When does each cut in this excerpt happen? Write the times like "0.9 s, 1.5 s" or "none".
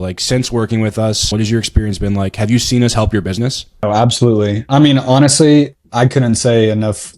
1.3 s, 3.8 s

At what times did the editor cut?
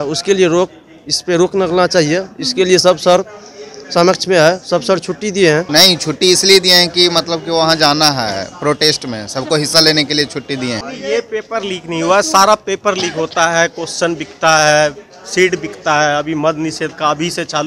5.7 s, 10.8 s

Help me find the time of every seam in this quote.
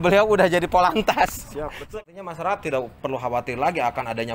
1.9 s

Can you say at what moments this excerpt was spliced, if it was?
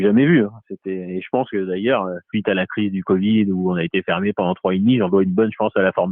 2.2 s

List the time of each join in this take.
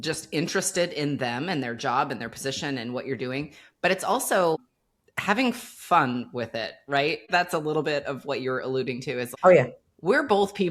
7.2 s, 9.3 s

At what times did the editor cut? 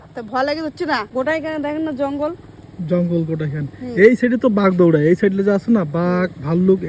1.1 s

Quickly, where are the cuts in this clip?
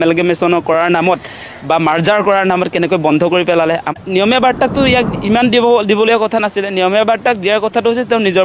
3.9 s

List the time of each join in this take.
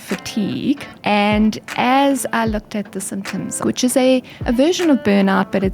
0.9 s, 3.6 s

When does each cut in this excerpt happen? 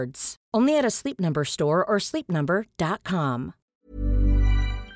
3.6 s

